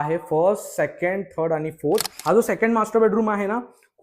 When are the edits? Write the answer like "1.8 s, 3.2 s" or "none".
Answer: 2.1 s